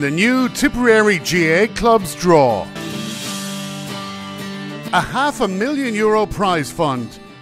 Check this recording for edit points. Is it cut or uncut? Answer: cut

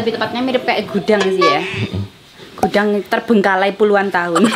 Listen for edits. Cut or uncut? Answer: uncut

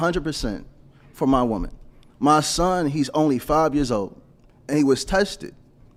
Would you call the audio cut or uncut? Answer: uncut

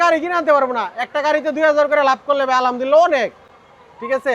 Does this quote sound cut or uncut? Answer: uncut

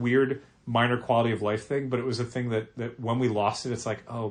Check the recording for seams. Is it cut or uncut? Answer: uncut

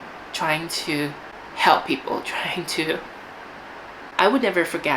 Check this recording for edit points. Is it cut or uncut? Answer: cut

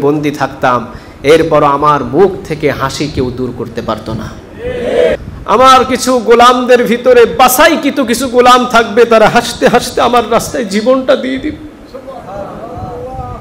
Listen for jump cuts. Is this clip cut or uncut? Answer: cut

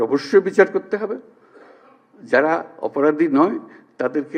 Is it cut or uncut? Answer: uncut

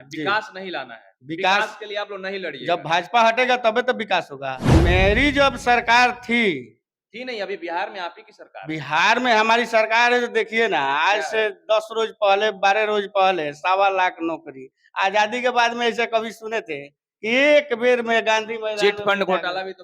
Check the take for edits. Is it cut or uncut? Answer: cut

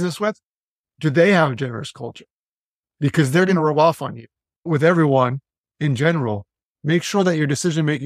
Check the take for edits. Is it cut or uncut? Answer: cut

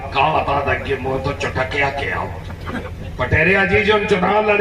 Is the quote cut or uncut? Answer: cut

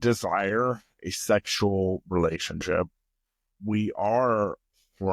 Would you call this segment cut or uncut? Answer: uncut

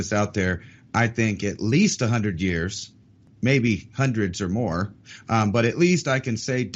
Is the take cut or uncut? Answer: uncut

